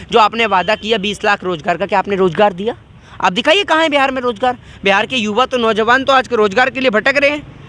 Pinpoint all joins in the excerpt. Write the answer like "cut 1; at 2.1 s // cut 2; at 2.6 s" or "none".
none